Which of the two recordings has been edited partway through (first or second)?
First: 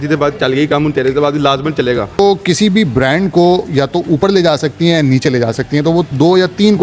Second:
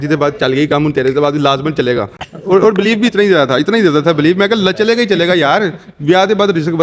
first